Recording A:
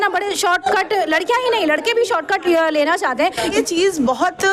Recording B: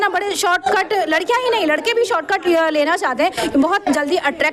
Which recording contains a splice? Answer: A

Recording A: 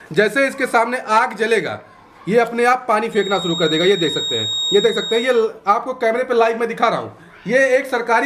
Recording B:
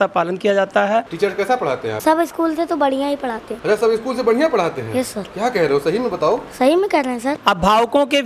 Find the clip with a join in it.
B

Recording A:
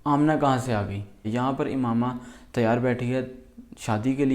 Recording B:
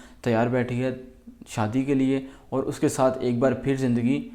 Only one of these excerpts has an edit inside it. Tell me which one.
A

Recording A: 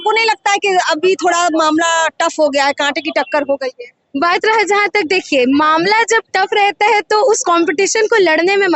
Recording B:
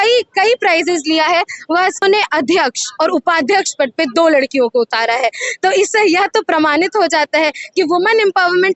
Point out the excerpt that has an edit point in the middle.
B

